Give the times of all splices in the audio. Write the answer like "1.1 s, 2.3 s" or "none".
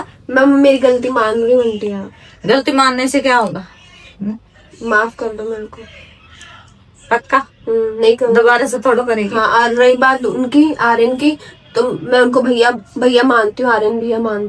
none

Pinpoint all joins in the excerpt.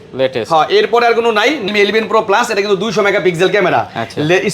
1.7 s

